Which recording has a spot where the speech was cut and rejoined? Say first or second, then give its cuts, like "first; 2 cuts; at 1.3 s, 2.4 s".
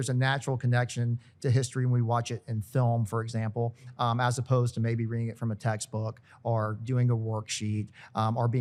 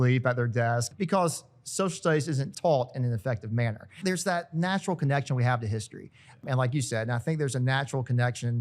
second; 4 cuts; at 0.9 s, 2.5 s, 4.0 s, 6.4 s